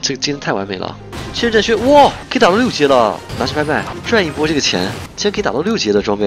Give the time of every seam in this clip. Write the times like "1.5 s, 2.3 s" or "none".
1.1 s, 2.2 s, 4.0 s